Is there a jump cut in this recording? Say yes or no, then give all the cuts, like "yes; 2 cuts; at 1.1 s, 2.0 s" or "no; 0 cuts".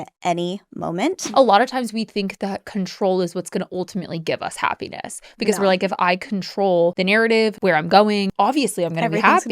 yes; 3 cuts; at 1.2 s, 7.0 s, 8.3 s